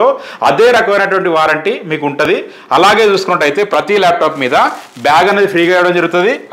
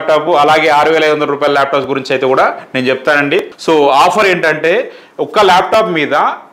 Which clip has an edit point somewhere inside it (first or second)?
second